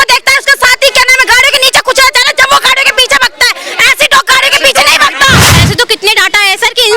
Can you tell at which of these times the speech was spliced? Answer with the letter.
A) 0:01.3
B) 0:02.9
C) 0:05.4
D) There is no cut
C